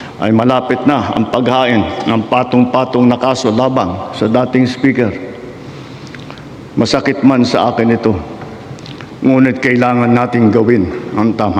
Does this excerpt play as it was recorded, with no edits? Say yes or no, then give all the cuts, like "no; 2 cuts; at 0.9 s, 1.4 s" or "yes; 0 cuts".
yes; 0 cuts